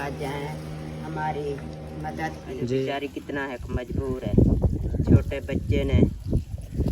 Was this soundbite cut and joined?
yes; 1 cut; at 2.8 s

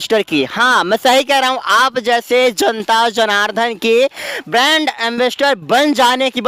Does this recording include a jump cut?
no; 0 cuts

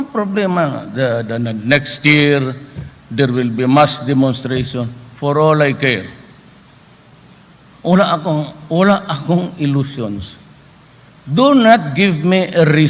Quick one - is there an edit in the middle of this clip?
no; 0 cuts

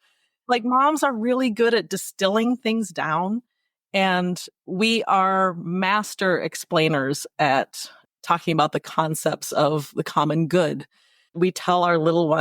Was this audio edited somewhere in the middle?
yes; 1 cut; at 11.2 s

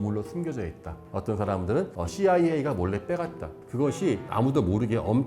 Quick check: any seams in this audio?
yes; 1 cut; at 3.6 s

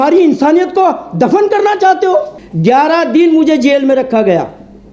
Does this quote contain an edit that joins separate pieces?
yes; 1 cut; at 2.4 s

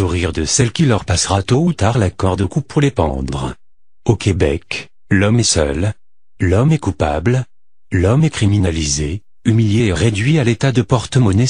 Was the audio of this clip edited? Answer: no; 0 cuts

